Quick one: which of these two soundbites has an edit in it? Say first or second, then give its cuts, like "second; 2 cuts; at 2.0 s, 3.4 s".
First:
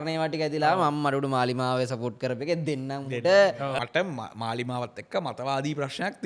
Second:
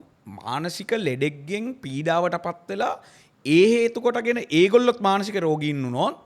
first; 1 cut; at 3.8 s